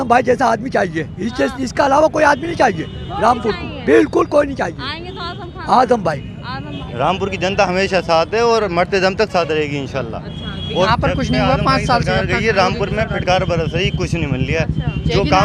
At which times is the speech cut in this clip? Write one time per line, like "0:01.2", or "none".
0:06.8
0:10.9

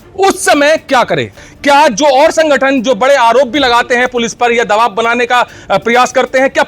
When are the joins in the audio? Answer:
0:01.5

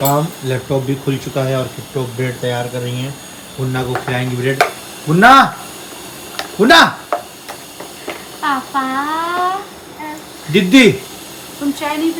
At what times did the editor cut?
none

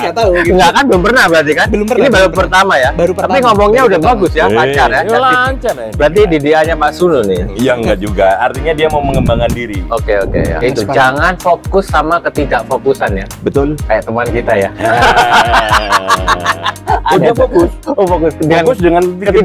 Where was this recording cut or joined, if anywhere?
0:10.6

